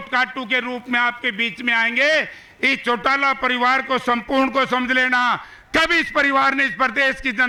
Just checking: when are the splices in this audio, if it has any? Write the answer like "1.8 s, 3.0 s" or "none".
none